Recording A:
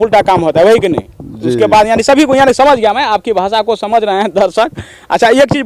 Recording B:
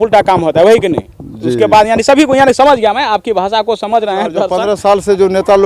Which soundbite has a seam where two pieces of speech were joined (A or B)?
B